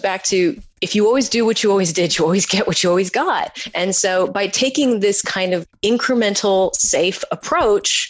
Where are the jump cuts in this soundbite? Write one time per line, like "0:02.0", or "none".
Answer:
0:05.6

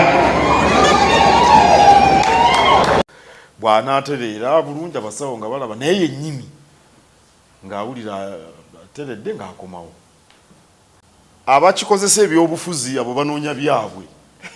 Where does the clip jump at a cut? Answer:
0:03.1
0:11.0

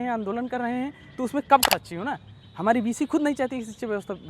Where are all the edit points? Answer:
0:01.6

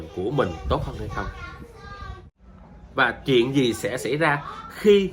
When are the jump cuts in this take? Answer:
0:02.3

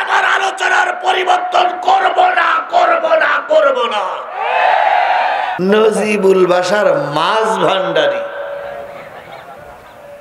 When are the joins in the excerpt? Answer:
0:05.5

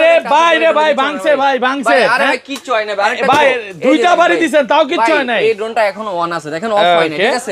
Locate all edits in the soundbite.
none

